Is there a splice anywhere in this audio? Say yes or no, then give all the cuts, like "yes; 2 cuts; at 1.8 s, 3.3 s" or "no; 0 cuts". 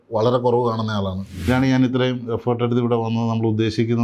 yes; 1 cut; at 1.5 s